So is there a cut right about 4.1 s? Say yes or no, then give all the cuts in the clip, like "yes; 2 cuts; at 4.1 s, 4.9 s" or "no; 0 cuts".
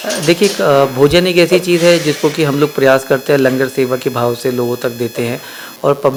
no; 0 cuts